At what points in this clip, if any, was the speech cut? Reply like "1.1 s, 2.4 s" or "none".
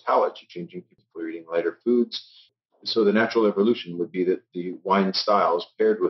1.0 s, 2.5 s